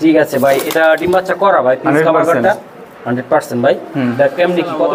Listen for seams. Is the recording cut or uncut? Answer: uncut